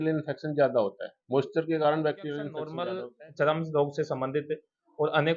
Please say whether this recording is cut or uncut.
cut